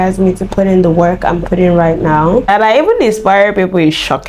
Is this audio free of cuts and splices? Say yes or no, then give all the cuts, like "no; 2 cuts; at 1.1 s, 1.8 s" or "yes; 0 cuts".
no; 1 cut; at 2.5 s